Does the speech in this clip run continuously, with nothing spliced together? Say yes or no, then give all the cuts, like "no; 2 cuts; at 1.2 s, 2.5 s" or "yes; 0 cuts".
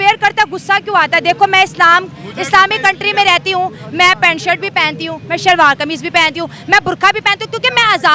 yes; 0 cuts